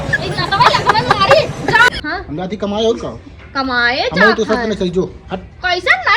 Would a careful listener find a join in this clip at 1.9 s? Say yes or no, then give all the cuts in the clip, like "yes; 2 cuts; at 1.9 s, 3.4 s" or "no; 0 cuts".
yes; 1 cut; at 1.9 s